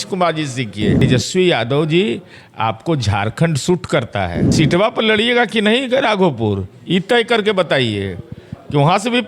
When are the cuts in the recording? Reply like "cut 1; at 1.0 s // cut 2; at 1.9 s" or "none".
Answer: cut 1; at 1.0 s // cut 2; at 4.4 s